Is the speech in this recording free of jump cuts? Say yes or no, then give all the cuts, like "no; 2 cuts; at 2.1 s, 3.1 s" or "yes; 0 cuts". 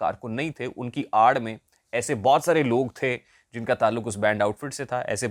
yes; 0 cuts